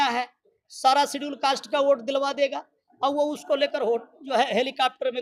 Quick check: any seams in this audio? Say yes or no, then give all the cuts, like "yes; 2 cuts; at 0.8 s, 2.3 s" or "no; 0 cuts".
no; 0 cuts